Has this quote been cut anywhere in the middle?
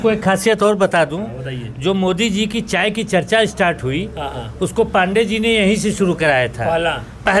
no; 0 cuts

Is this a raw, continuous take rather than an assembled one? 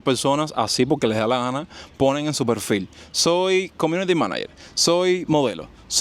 yes; 0 cuts

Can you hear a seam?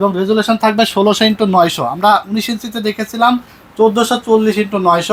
no; 0 cuts

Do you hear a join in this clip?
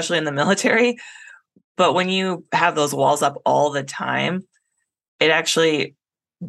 no; 0 cuts

